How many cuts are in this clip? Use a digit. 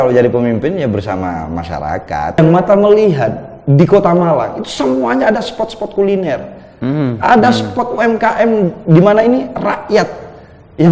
1